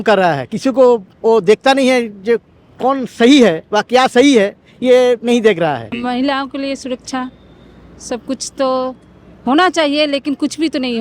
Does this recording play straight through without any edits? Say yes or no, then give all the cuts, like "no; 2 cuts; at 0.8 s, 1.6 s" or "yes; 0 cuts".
no; 1 cut; at 6.0 s